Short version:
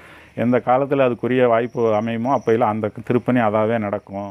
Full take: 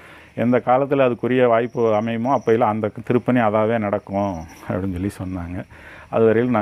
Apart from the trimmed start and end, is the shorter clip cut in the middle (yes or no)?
no